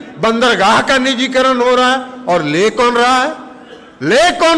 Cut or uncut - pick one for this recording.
uncut